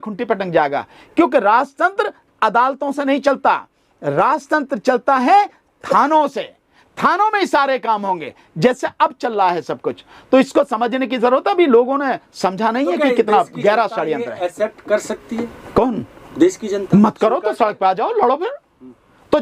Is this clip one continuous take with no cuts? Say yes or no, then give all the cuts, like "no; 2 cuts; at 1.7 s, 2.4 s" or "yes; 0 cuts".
yes; 0 cuts